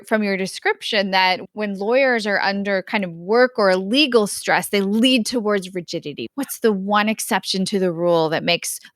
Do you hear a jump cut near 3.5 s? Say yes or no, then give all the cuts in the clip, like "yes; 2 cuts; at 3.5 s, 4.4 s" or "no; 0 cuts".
no; 2 cuts; at 1.4 s, 6.2 s